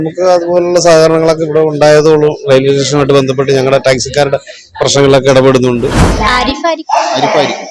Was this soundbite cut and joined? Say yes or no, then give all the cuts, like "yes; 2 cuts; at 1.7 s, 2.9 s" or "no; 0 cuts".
yes; 1 cut; at 6.1 s